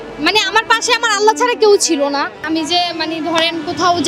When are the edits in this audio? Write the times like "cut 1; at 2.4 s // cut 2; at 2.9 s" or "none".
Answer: cut 1; at 2.4 s